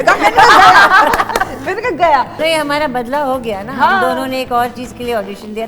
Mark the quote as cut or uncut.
cut